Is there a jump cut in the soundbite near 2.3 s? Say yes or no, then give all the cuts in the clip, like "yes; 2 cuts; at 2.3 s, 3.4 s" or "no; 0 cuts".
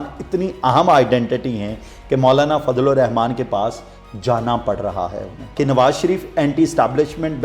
no; 1 cut; at 5.5 s